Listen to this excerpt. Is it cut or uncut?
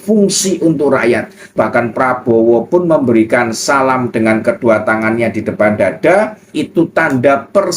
cut